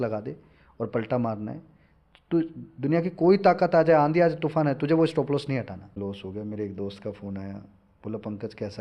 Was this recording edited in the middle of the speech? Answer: yes; 1 cut; at 6.0 s

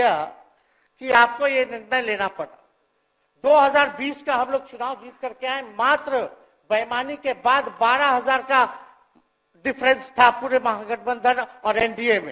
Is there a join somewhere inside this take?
no; 0 cuts

